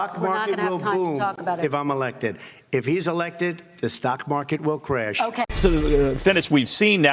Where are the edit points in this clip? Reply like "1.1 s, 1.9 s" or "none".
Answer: 5.5 s